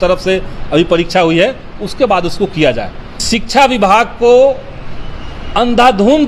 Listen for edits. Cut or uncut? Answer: cut